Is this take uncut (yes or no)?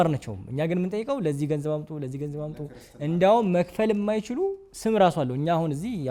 yes